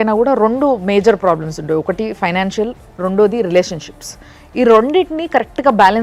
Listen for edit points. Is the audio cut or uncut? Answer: uncut